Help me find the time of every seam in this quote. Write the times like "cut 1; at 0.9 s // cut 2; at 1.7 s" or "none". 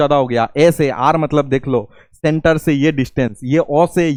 none